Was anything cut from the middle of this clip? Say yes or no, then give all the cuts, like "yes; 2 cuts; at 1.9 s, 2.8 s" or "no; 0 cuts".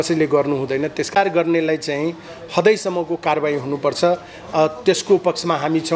yes; 1 cut; at 1.2 s